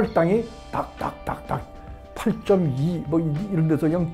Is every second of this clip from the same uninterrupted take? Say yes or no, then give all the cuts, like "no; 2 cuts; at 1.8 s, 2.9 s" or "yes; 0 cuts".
yes; 0 cuts